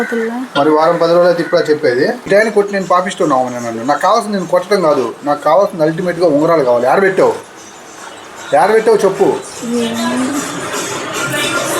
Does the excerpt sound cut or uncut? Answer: cut